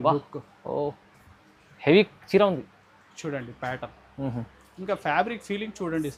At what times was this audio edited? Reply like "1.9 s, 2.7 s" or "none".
none